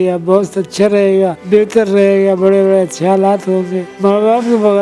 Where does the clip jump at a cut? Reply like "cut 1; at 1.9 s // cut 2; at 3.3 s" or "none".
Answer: cut 1; at 1.4 s // cut 2; at 3.8 s